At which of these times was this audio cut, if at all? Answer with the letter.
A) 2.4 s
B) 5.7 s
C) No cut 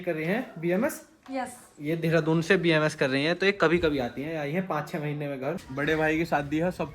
B